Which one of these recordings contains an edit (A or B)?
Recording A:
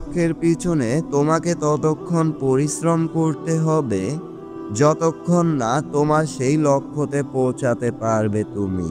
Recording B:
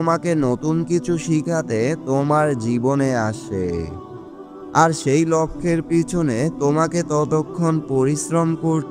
B